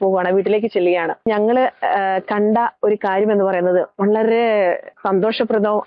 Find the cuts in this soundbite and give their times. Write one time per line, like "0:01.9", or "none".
none

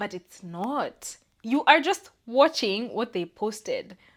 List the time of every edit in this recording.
none

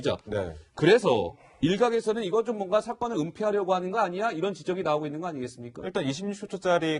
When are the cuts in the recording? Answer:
none

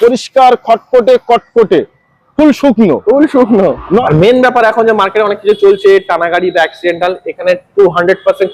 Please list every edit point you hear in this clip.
0:04.0

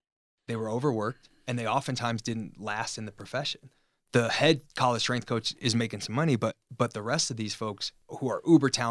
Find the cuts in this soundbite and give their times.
0:08.0

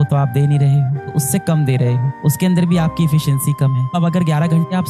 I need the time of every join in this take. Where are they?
0:01.1
0:03.9

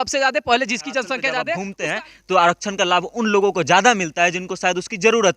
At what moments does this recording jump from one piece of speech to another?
0:01.4

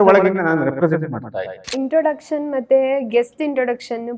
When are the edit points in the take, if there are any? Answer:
0:01.7

